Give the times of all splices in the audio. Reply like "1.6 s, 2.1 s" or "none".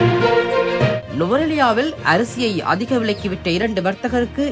none